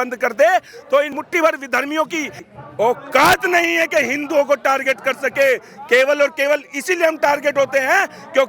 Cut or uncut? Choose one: cut